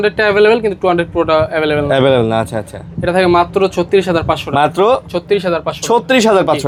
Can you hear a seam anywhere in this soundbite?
no; 0 cuts

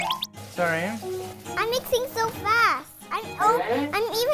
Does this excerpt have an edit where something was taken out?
no; 0 cuts

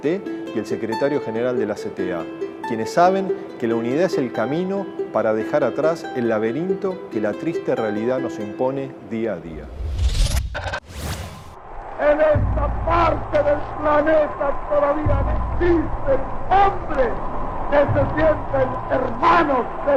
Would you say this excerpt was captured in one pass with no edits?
yes; 0 cuts

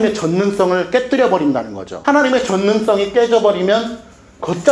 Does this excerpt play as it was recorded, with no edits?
yes; 0 cuts

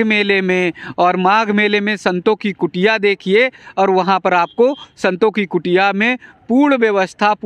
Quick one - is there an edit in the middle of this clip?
no; 0 cuts

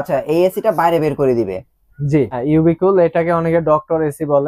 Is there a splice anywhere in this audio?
yes; 1 cut; at 2.4 s

